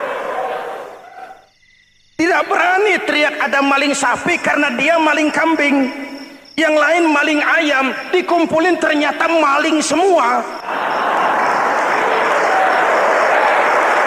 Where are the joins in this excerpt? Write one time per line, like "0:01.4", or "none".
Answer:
0:10.6